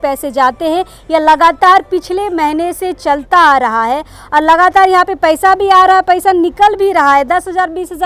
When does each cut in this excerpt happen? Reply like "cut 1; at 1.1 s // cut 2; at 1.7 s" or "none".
none